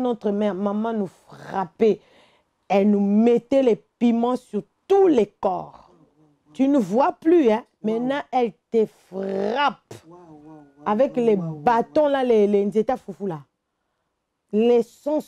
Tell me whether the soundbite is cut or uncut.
uncut